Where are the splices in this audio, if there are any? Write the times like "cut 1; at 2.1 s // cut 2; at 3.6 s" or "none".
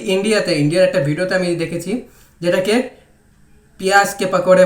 none